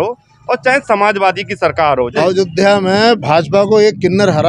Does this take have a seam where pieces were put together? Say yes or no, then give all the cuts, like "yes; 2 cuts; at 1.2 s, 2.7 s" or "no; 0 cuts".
yes; 1 cut; at 2.1 s